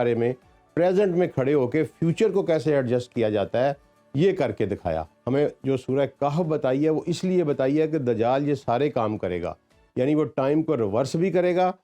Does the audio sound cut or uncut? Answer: cut